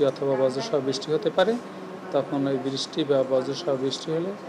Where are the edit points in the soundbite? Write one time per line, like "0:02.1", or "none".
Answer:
none